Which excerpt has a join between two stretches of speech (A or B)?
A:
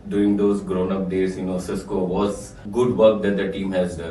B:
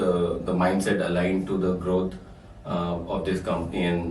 A